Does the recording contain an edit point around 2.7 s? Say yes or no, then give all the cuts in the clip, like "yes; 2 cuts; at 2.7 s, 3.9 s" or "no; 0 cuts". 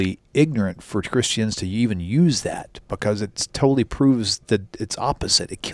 no; 0 cuts